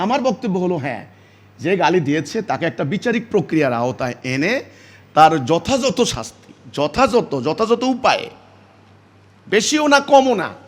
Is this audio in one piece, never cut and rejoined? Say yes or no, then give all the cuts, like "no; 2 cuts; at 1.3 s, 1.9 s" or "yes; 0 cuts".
yes; 0 cuts